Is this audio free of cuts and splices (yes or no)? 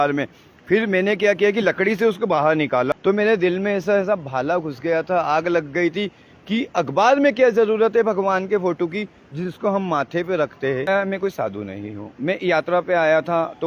no